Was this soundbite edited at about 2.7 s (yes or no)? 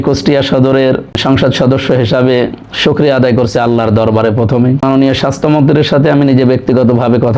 no